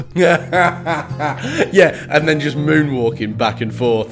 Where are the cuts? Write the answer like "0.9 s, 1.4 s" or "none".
none